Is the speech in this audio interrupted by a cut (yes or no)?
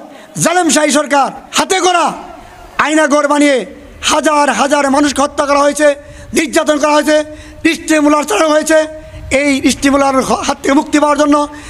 yes